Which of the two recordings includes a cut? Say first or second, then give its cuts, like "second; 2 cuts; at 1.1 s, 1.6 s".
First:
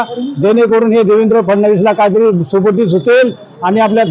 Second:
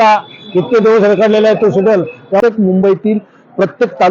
second; 1 cut; at 2.4 s